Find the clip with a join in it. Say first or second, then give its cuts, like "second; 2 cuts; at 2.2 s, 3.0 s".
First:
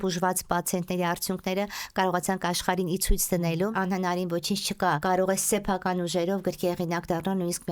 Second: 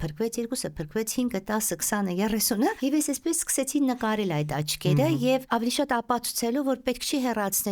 first; 1 cut; at 3.7 s